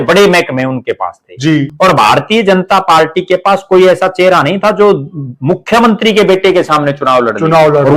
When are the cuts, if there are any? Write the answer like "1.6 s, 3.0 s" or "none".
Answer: 1.7 s